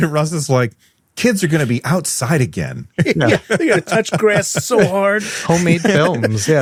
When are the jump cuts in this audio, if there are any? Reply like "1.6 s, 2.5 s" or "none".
none